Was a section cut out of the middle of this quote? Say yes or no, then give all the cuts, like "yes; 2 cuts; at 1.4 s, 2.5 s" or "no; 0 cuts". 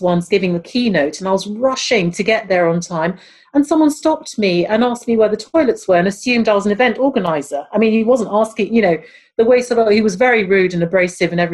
no; 0 cuts